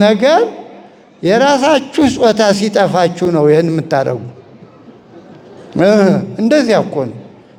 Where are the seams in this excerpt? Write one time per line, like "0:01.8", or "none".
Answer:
none